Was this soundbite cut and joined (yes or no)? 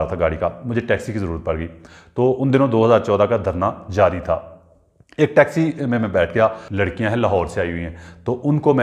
yes